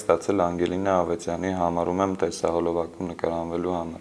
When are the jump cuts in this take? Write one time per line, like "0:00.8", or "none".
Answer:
none